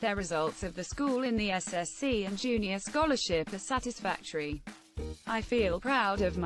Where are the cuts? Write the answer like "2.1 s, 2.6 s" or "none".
none

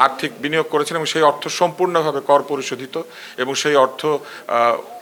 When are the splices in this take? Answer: none

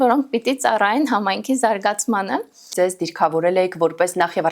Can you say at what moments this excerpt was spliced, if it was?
2.7 s

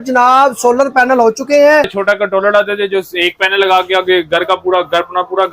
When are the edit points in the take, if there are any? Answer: 1.9 s

